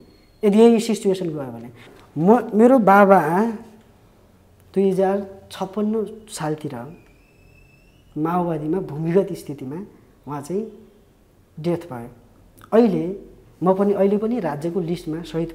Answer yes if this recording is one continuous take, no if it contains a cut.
no